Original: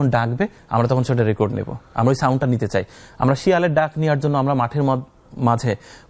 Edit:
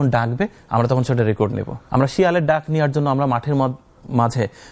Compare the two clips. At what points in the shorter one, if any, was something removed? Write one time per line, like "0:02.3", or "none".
0:01.7